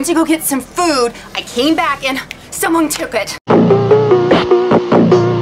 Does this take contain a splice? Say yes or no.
yes